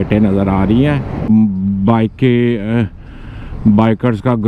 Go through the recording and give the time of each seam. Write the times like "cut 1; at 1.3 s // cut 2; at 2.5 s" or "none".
cut 1; at 1.1 s